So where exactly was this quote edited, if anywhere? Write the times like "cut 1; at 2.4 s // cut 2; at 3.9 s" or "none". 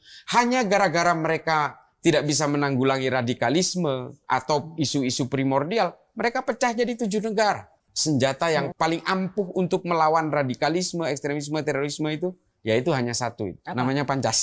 cut 1; at 7.9 s // cut 2; at 8.7 s